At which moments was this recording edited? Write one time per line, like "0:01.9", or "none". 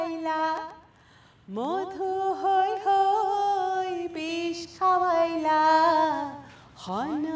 none